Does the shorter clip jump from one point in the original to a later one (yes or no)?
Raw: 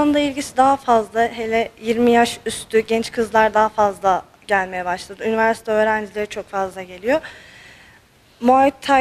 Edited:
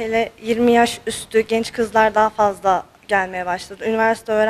no